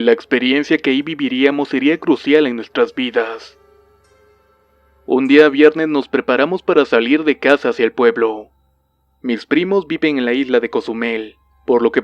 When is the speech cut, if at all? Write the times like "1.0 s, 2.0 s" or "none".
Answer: none